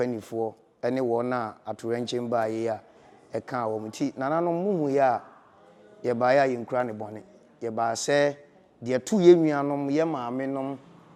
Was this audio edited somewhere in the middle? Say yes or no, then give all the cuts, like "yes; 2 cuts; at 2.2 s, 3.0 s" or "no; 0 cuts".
no; 0 cuts